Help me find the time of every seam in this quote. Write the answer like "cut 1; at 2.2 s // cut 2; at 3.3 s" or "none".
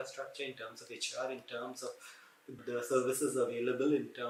none